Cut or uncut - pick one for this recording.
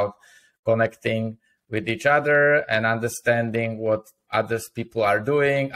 uncut